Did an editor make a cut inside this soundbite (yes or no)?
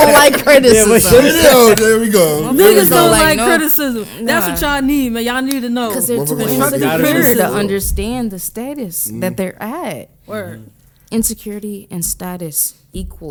no